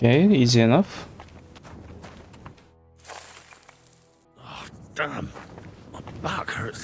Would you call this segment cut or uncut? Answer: cut